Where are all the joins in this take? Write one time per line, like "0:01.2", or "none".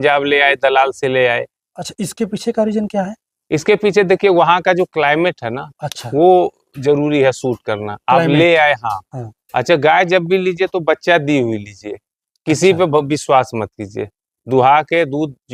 none